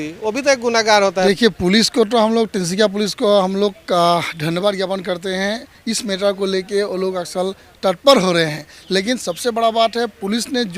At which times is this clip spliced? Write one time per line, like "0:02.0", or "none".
0:01.2